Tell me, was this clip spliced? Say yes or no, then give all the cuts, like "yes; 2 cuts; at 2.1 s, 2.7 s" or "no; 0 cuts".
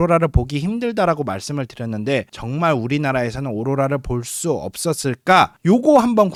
no; 0 cuts